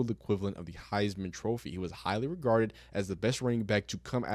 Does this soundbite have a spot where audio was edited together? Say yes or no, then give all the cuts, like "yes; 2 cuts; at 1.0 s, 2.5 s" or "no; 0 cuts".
no; 0 cuts